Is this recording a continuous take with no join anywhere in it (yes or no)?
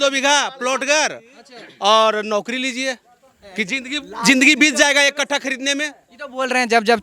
yes